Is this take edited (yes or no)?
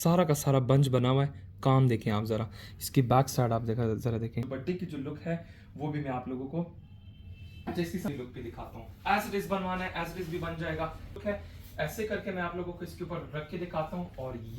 yes